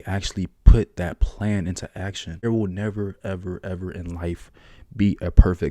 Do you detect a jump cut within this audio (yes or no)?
yes